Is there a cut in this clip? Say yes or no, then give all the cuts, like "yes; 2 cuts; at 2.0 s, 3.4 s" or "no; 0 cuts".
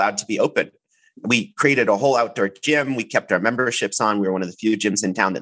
yes; 1 cut; at 1.2 s